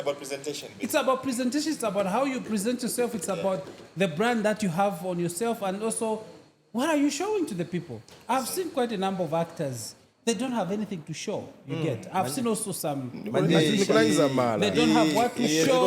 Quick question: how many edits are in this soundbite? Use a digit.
0